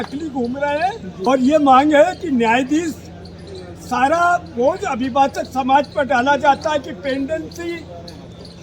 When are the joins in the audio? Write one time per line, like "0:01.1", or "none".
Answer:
0:01.3